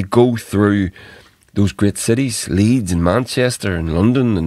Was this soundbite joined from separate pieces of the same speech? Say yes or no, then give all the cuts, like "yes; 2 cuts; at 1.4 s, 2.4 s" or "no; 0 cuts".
no; 0 cuts